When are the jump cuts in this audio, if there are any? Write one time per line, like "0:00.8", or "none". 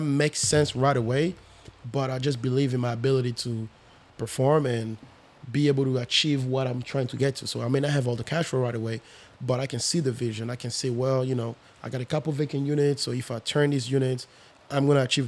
none